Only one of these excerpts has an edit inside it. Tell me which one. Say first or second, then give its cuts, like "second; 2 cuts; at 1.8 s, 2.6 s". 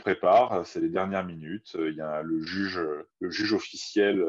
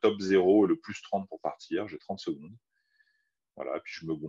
first; 1 cut; at 3.1 s